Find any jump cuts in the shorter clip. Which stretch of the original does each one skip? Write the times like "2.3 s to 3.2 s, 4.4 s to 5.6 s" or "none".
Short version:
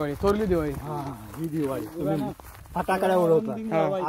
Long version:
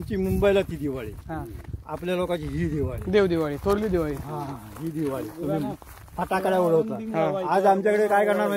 none